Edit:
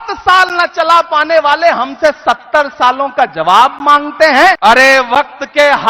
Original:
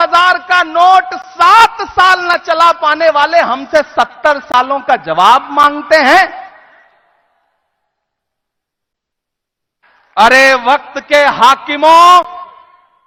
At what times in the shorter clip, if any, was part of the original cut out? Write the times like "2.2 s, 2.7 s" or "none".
4.6 s